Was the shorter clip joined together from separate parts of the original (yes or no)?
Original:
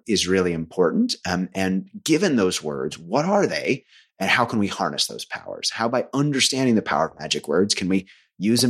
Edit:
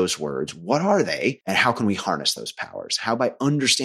yes